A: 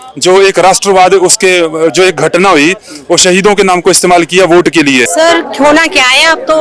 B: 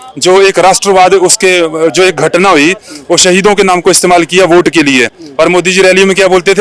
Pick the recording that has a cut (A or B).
A